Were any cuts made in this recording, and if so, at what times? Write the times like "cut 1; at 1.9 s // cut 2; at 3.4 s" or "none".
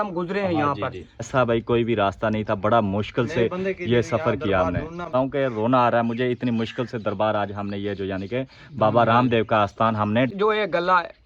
cut 1; at 1.3 s // cut 2; at 5.1 s // cut 3; at 10.3 s